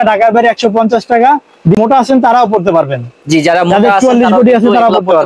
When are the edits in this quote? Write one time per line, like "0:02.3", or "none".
0:01.8